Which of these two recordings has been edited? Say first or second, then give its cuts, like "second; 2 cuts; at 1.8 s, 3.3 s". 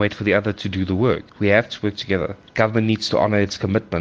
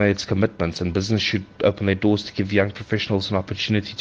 first; 2 cuts; at 1.3 s, 2.4 s